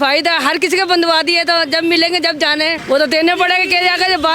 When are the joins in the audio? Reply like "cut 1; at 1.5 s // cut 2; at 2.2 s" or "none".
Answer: cut 1; at 2.8 s